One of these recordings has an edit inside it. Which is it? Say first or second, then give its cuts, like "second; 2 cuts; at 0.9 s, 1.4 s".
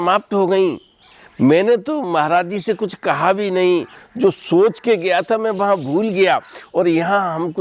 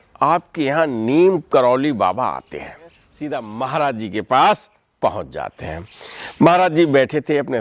second; 1 cut; at 3.1 s